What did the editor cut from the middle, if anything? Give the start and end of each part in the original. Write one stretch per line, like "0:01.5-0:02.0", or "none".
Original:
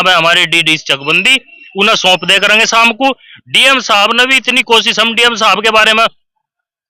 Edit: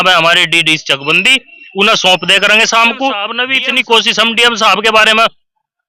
0:03.4-0:04.2